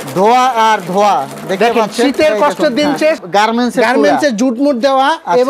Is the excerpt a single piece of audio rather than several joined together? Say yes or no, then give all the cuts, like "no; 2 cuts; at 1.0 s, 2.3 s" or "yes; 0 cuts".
no; 1 cut; at 3.2 s